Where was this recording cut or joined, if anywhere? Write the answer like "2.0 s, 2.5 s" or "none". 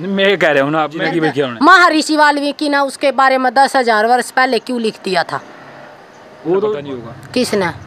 1.3 s, 6.9 s